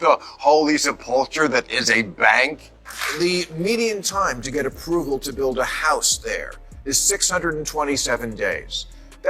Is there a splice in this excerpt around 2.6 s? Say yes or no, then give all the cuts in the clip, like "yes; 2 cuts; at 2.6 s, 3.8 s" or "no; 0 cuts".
yes; 1 cut; at 2.6 s